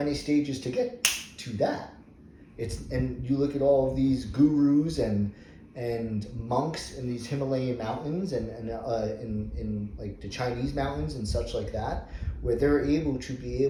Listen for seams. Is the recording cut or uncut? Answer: uncut